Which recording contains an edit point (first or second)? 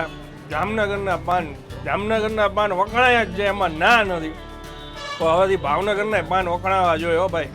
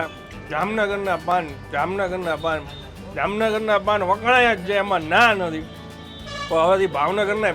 first